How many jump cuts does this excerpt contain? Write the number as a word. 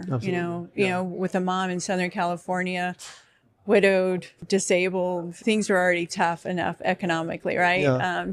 two